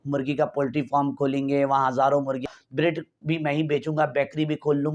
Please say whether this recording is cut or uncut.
cut